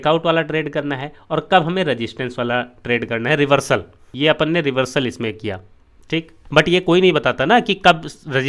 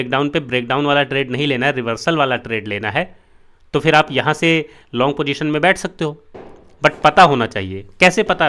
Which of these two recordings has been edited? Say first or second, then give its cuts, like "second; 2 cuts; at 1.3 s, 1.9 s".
first; 2 cuts; at 4.1 s, 6.1 s